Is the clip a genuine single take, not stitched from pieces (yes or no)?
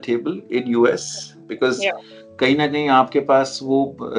yes